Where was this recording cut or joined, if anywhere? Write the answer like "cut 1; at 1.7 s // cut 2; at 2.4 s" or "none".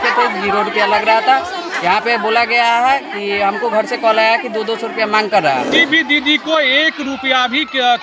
cut 1; at 5.7 s